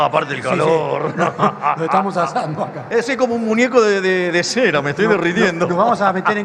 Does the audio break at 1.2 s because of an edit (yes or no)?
no